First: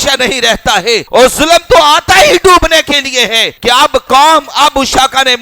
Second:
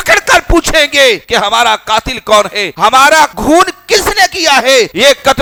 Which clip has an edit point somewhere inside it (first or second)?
first